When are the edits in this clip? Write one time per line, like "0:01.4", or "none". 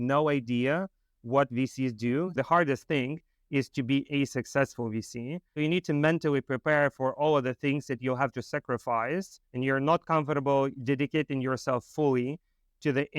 0:02.3
0:05.6
0:09.4